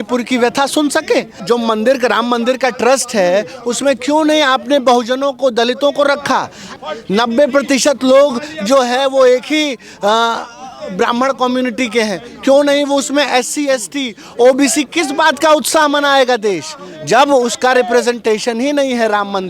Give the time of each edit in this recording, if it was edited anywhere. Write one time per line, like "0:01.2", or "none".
0:01.3
0:06.6